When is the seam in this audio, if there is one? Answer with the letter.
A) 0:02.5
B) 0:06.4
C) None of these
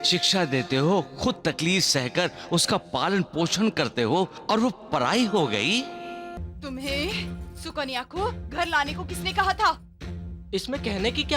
B